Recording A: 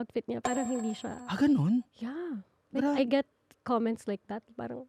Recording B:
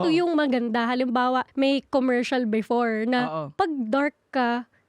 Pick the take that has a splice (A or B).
B